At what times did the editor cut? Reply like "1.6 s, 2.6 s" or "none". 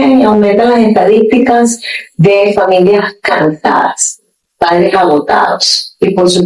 none